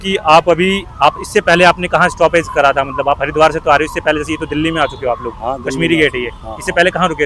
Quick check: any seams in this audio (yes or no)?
no